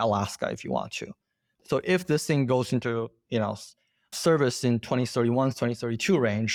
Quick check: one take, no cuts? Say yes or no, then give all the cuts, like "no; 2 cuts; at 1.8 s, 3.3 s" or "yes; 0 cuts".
yes; 0 cuts